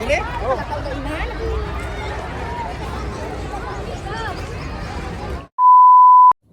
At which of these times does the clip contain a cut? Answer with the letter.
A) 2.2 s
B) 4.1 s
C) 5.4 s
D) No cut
C